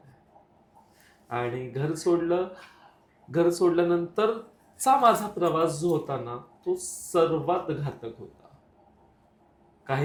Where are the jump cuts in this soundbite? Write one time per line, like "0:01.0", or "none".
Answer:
none